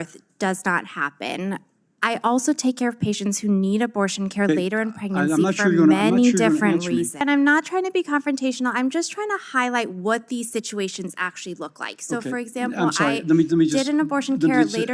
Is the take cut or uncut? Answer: cut